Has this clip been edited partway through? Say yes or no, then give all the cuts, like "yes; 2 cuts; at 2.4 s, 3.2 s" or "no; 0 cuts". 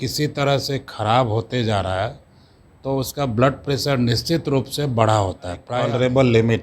yes; 1 cut; at 5.7 s